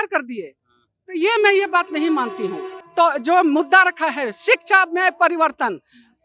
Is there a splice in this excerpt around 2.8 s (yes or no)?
yes